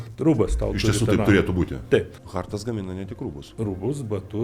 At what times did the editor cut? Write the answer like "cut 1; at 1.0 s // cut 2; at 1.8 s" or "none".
cut 1; at 2.2 s // cut 2; at 3.4 s